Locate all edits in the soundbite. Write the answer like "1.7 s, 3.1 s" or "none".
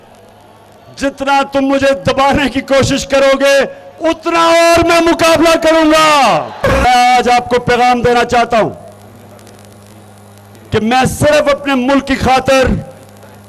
6.8 s